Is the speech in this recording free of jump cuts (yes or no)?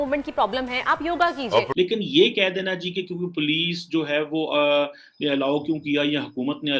no